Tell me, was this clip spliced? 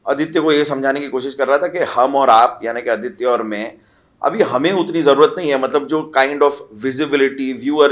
no; 0 cuts

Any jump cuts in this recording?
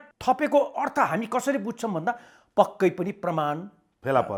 no; 0 cuts

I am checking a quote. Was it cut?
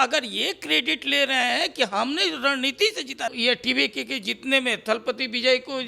yes; 1 cut; at 3.4 s

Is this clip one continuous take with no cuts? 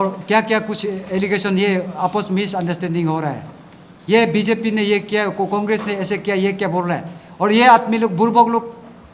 yes; 0 cuts

